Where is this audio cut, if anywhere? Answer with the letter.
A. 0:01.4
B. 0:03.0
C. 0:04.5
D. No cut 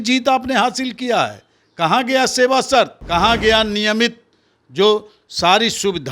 B